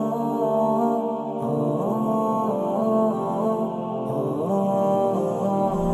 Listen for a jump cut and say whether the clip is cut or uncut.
uncut